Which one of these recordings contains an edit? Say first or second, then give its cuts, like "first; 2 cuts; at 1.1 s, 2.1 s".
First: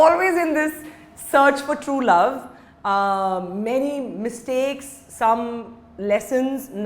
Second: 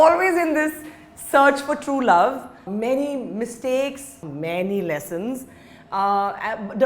second; 2 cuts; at 2.7 s, 4.2 s